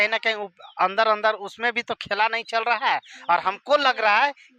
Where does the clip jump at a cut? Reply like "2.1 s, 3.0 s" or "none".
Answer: none